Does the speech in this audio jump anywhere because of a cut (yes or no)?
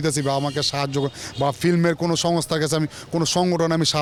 no